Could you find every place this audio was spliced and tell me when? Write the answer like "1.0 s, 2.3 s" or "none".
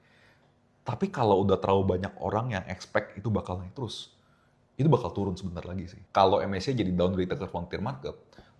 6.0 s